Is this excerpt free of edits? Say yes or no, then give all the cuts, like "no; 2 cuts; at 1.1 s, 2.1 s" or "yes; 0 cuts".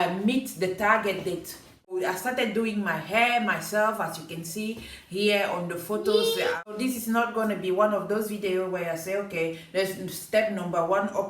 no; 2 cuts; at 2.0 s, 6.7 s